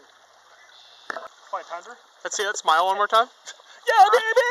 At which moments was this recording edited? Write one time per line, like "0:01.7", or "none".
0:01.3